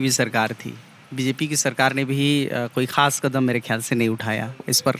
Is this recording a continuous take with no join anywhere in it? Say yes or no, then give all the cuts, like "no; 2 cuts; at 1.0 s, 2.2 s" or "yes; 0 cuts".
yes; 0 cuts